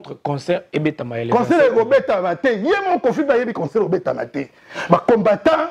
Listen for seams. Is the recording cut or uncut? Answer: uncut